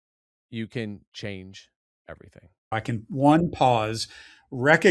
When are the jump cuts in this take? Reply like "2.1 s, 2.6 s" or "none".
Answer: 2.7 s